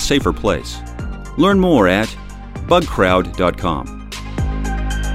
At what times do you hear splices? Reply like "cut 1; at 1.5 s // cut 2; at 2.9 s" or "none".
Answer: cut 1; at 4.1 s